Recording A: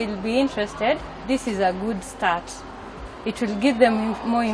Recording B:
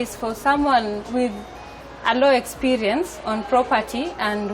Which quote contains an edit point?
A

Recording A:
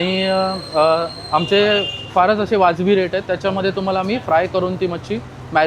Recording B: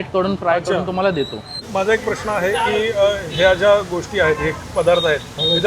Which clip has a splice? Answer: B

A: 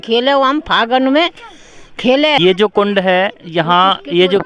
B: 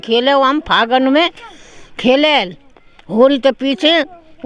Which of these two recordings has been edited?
A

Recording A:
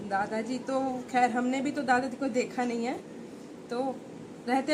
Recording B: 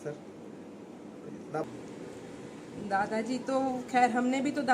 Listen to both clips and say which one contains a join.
B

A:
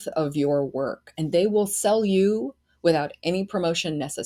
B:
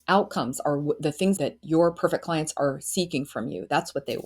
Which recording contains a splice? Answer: B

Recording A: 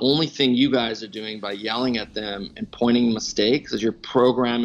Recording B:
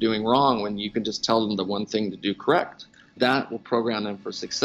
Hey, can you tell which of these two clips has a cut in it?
B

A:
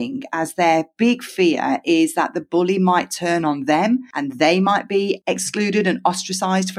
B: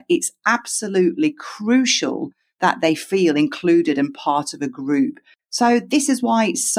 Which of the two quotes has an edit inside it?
B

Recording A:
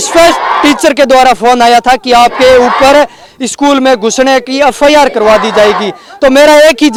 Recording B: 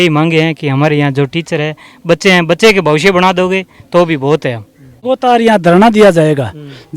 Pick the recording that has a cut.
B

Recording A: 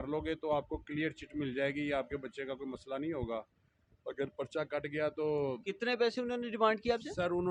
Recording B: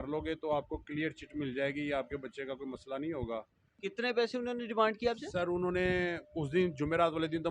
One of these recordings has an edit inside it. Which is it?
B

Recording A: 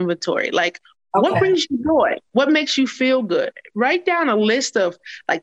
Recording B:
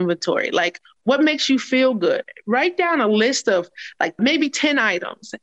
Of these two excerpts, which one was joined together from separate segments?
B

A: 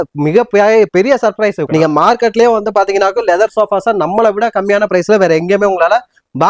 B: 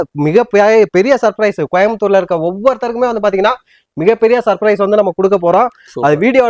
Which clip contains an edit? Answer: A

